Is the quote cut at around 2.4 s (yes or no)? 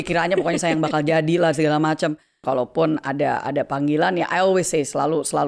yes